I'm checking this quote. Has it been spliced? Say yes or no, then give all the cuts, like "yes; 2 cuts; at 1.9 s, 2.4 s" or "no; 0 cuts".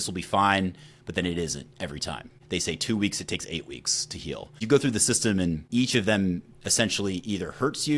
yes; 3 cuts; at 2.4 s, 4.6 s, 5.7 s